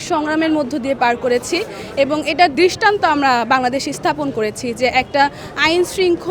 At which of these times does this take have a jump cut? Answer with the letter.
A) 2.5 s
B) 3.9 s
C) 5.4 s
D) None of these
A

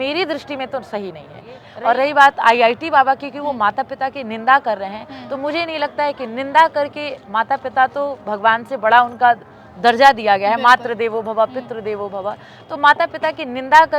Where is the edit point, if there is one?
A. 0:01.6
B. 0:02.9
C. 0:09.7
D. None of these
A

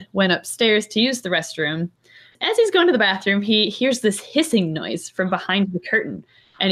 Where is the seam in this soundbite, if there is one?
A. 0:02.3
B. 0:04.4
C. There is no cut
A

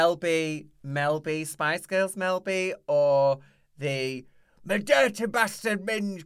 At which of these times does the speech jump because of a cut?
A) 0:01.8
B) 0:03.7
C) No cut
C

